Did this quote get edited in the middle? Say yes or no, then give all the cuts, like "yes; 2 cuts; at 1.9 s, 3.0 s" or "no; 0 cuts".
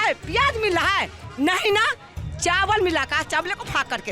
no; 0 cuts